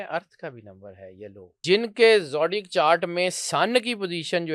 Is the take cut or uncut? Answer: cut